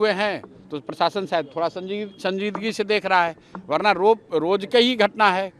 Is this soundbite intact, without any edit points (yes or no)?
yes